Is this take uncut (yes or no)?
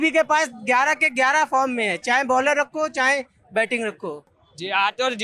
no